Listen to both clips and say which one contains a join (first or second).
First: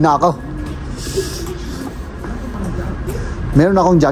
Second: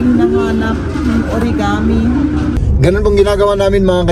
second